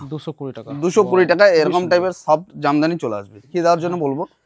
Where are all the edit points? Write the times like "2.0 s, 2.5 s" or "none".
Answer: 3.5 s

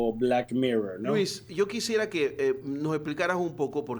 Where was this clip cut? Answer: none

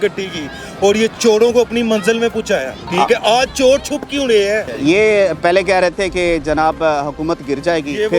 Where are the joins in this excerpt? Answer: 2.8 s, 4.7 s

